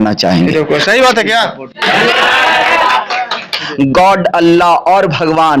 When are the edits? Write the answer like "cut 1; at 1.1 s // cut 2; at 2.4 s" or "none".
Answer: cut 1; at 3.6 s